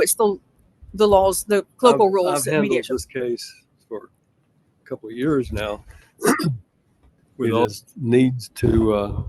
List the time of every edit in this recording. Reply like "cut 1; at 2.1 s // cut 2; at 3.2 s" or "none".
cut 1; at 7.7 s